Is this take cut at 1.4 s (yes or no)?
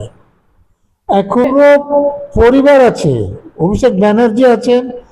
yes